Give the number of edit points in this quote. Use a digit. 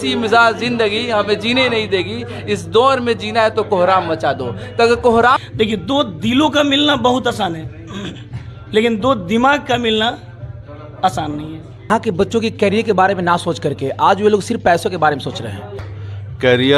3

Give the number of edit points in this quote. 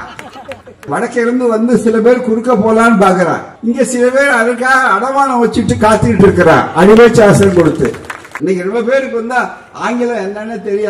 3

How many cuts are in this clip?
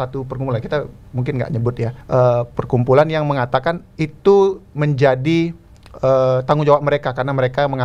2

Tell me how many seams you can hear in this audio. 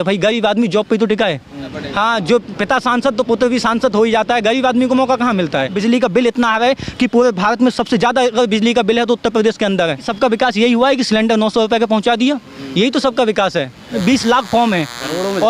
4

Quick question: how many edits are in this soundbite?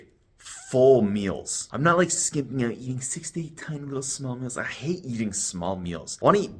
0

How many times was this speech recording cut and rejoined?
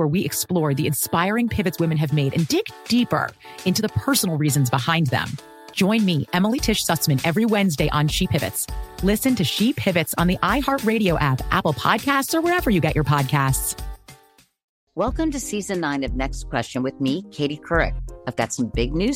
1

